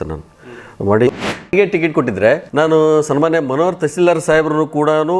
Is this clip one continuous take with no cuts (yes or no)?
no